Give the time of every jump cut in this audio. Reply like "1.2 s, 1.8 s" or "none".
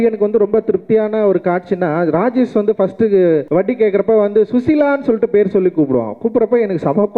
3.5 s